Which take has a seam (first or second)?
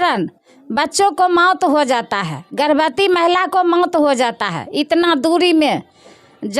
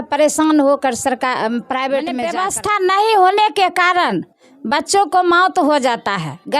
second